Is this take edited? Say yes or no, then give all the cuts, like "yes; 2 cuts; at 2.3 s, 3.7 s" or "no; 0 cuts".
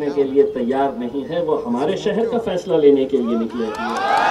no; 0 cuts